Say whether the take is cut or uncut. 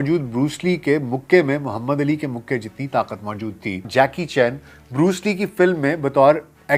cut